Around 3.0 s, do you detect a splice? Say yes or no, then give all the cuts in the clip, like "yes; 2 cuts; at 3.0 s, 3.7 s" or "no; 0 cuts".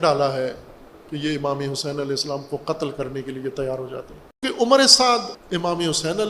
no; 2 cuts; at 4.4 s, 5.4 s